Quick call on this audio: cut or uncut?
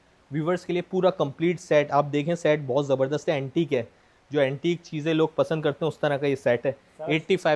uncut